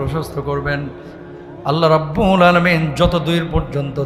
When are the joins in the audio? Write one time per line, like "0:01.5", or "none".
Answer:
none